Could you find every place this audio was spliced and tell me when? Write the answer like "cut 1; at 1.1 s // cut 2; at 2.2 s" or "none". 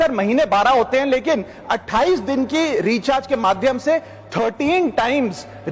none